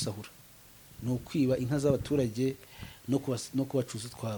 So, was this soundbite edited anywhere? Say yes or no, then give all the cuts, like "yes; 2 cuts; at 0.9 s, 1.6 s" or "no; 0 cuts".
no; 0 cuts